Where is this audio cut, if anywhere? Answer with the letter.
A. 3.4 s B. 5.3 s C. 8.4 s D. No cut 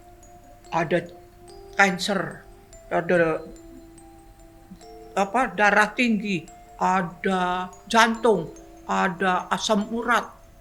D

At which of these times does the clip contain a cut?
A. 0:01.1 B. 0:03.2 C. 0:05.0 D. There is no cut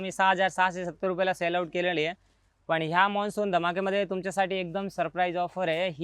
D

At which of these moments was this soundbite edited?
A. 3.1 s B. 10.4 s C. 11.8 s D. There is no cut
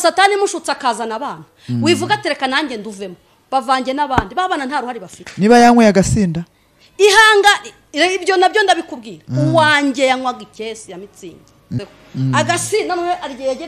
C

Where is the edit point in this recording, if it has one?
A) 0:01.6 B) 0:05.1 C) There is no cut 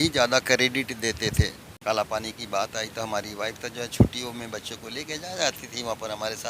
A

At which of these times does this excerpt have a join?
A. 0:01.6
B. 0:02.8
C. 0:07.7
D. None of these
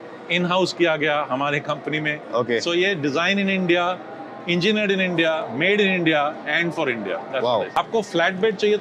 C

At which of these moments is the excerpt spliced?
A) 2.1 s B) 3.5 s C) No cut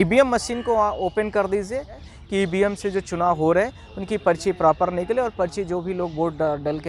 A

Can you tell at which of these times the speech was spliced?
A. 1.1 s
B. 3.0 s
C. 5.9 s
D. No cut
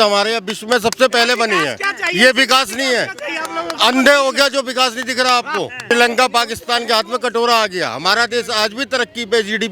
C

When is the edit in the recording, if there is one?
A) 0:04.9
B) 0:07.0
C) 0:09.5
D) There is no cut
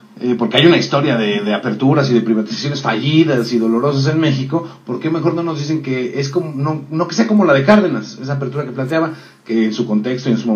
A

